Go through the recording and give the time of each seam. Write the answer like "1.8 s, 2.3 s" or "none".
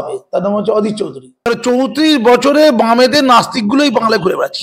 1.5 s